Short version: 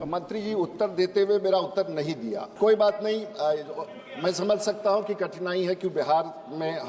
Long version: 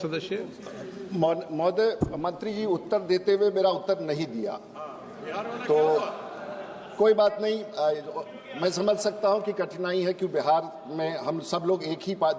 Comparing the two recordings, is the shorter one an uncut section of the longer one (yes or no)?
no